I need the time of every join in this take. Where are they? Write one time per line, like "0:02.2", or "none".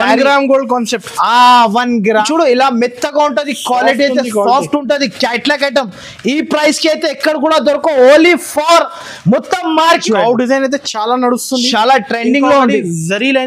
0:02.2
0:10.0